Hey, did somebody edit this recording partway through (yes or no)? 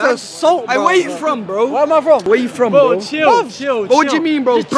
no